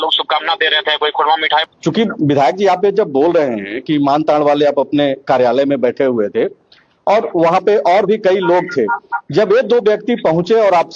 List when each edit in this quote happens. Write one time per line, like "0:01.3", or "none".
0:01.6